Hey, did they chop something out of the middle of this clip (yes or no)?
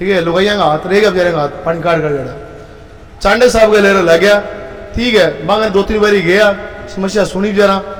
no